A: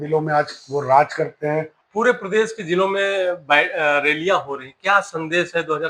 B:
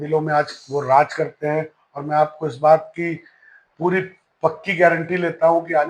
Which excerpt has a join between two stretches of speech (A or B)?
A